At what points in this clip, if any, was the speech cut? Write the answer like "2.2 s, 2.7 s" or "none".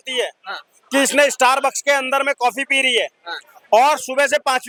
none